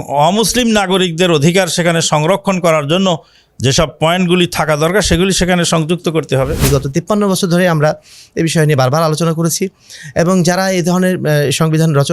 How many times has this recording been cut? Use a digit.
1